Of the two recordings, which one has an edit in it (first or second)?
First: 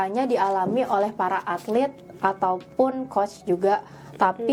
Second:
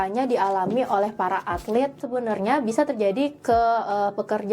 second